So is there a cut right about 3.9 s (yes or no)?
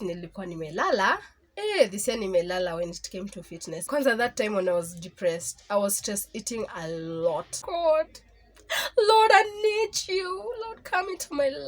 yes